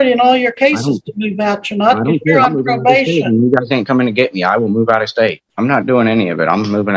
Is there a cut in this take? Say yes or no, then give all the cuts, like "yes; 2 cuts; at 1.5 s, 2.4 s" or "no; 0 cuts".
yes; 1 cut; at 5.4 s